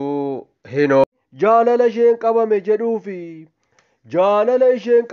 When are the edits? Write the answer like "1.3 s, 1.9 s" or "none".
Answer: 1.0 s